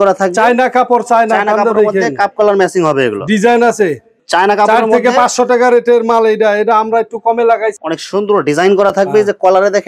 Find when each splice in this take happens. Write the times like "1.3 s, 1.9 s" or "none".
4.1 s, 7.8 s